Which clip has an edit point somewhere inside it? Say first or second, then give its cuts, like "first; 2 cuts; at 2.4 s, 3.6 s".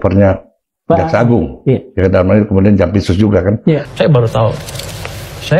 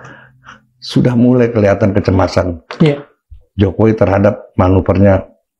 first; 1 cut; at 3.9 s